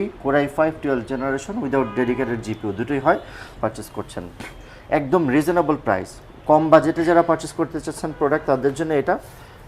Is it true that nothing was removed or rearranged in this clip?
no; 1 cut; at 3.5 s

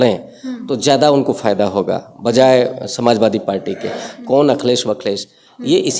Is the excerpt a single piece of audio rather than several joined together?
no; 1 cut; at 4.1 s

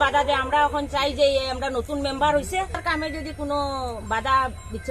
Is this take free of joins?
no; 1 cut; at 2.8 s

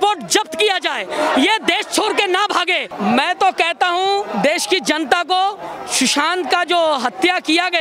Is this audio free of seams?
no; 1 cut; at 2.9 s

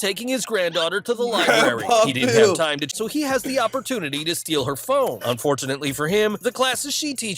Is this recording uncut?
no; 2 cuts; at 1.2 s, 2.9 s

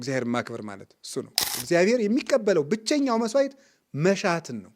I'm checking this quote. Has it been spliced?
yes; 1 cut; at 1.5 s

